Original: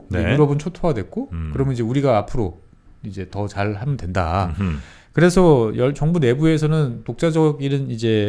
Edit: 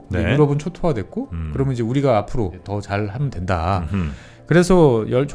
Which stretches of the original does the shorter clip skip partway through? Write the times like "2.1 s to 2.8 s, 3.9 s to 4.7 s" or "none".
2.6 s to 3.3 s